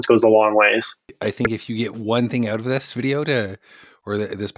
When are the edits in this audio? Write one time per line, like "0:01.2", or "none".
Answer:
0:01.1

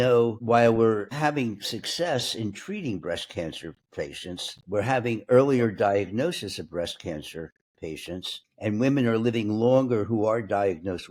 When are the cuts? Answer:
none

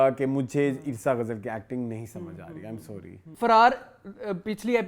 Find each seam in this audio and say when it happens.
0:03.3

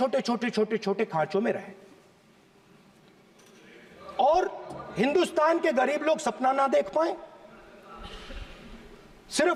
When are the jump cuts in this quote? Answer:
none

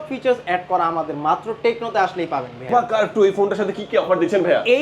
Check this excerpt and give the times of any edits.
0:02.7

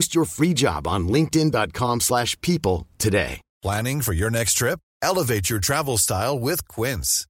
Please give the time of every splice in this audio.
0:03.4

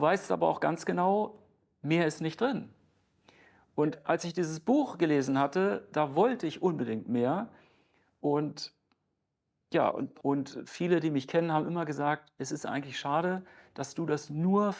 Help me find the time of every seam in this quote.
0:10.1

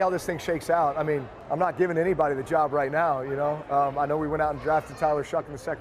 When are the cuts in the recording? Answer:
0:01.4

